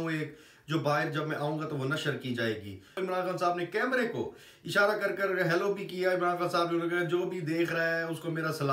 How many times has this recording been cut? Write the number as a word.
one